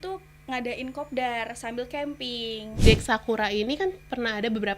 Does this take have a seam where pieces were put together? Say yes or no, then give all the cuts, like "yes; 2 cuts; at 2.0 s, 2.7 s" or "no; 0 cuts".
yes; 1 cut; at 2.6 s